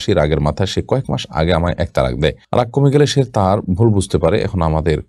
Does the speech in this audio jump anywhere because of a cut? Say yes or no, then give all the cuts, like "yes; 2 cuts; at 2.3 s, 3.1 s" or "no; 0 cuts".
no; 0 cuts